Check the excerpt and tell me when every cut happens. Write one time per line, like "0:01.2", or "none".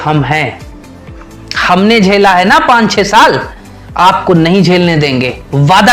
none